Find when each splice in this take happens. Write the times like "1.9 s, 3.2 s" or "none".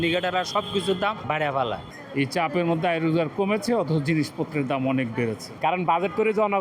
1.8 s, 5.5 s